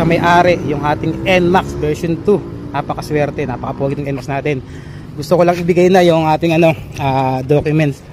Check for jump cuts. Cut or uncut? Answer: uncut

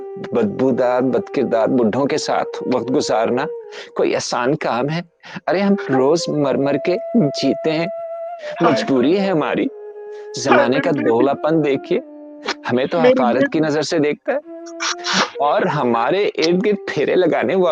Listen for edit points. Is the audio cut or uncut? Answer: uncut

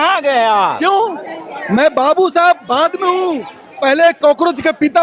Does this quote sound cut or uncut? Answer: uncut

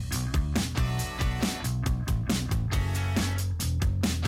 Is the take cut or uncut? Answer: cut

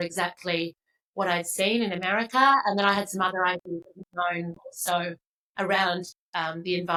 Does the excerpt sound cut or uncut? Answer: uncut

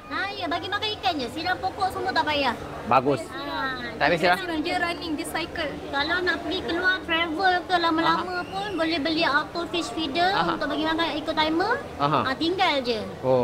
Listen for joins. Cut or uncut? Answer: uncut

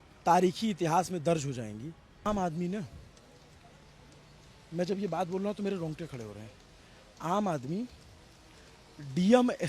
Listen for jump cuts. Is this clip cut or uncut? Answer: cut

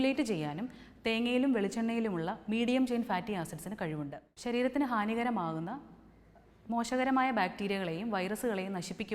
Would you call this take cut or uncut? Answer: uncut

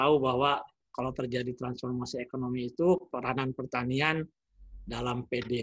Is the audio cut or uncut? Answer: uncut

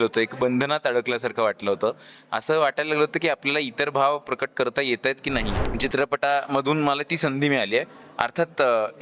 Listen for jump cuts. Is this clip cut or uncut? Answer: cut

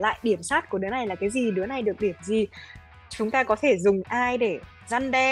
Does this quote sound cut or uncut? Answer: uncut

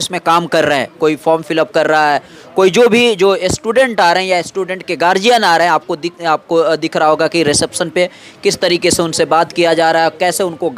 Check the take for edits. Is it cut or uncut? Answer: uncut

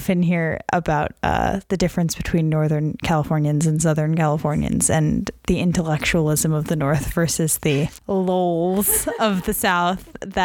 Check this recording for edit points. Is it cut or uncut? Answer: uncut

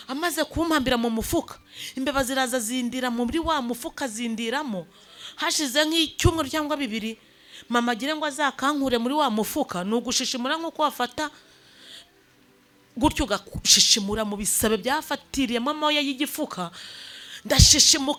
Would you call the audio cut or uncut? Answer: uncut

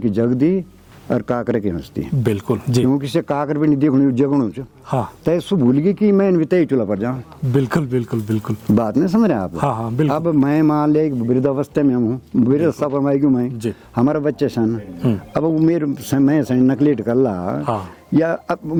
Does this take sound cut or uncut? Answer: uncut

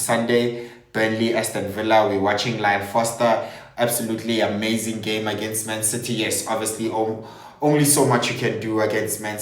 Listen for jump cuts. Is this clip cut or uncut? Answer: uncut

